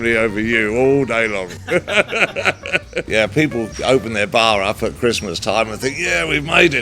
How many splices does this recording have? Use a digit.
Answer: 1